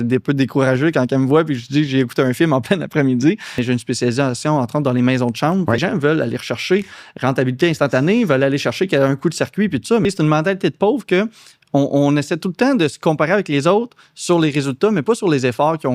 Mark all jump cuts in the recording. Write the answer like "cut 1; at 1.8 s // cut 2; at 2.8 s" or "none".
cut 1; at 3.6 s // cut 2; at 5.9 s // cut 3; at 10.0 s